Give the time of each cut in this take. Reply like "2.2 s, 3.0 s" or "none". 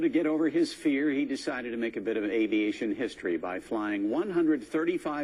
none